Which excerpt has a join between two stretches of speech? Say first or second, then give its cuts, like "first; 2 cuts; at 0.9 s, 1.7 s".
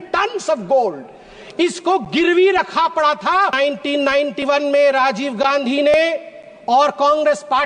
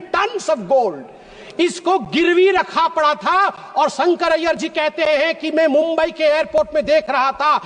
first; 1 cut; at 3.5 s